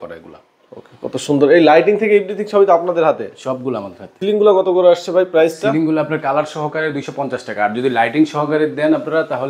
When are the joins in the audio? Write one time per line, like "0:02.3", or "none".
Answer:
0:04.1